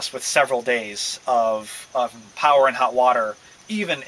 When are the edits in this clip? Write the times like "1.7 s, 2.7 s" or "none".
2.3 s